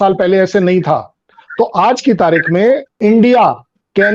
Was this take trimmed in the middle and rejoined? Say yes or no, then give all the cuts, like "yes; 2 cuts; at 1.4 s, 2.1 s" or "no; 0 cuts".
yes; 1 cut; at 2.9 s